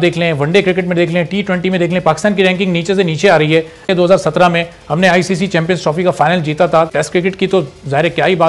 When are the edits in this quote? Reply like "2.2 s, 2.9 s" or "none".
3.9 s, 6.9 s